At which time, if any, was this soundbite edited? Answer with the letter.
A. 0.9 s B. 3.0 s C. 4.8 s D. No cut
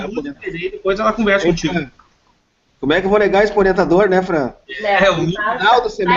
B